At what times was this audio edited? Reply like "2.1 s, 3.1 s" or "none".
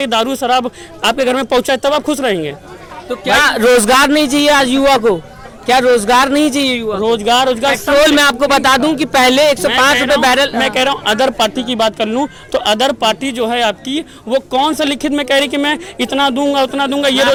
none